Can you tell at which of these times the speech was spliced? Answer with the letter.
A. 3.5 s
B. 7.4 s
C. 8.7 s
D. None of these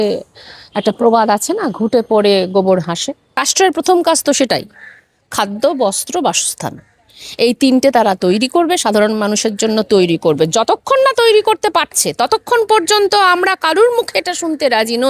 A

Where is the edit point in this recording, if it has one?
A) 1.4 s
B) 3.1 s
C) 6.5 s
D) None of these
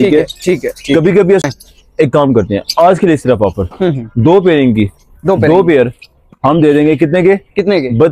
A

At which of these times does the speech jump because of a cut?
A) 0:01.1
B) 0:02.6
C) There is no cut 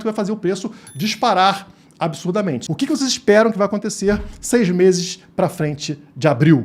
B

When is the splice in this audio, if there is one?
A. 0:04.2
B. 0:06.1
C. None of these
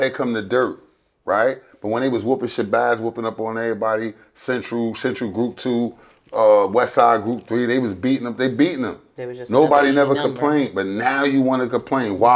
C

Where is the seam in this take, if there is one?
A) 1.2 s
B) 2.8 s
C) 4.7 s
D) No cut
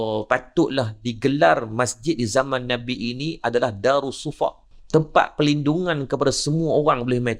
C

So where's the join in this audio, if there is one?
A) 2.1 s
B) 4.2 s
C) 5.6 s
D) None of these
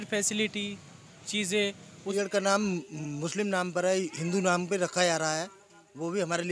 A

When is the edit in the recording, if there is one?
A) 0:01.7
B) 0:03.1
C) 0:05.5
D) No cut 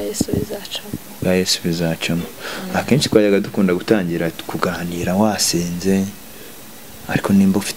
D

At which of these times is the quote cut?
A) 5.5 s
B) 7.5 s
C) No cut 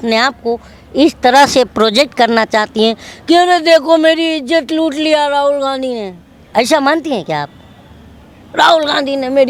C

